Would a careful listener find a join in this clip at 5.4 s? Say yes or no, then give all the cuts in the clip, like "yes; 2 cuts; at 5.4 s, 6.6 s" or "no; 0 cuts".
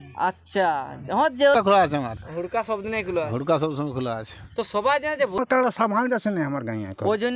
yes; 2 cuts; at 1.6 s, 5.4 s